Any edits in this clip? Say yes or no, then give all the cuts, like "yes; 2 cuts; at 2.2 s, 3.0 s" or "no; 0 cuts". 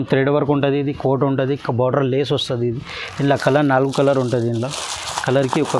no; 0 cuts